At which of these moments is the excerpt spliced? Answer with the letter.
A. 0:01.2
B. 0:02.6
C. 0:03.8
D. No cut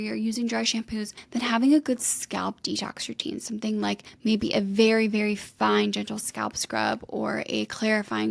A